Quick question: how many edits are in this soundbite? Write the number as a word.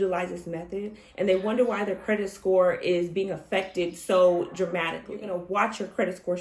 one